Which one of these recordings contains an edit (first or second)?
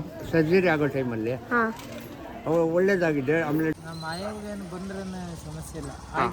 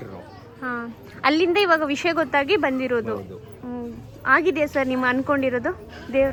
first